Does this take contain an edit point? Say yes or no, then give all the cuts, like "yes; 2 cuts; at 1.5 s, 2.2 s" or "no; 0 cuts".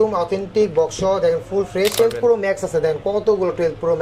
yes; 1 cut; at 2.0 s